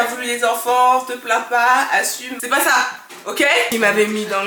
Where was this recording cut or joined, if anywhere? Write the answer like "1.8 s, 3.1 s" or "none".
2.2 s, 3.7 s